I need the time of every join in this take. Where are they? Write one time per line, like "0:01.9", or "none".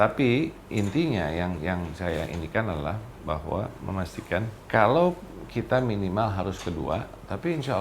0:04.6